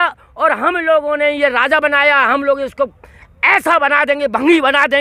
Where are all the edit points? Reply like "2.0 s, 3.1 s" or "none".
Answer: none